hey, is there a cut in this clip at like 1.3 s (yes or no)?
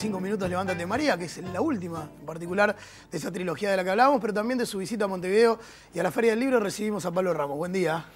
yes